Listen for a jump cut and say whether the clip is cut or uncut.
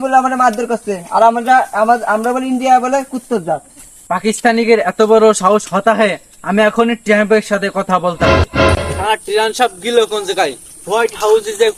uncut